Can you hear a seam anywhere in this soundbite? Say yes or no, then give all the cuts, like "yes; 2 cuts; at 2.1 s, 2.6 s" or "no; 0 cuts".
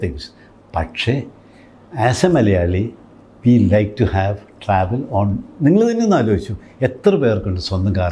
no; 0 cuts